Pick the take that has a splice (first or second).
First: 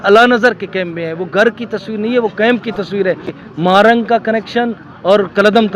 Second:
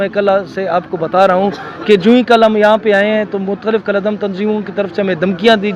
first